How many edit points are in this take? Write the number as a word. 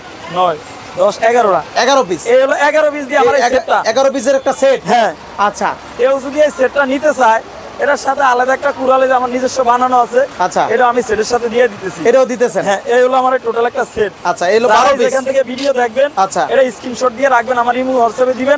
zero